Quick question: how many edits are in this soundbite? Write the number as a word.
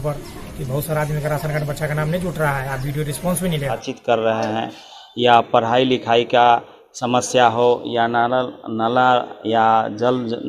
one